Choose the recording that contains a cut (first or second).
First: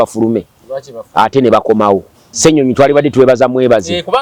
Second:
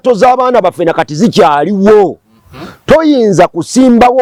first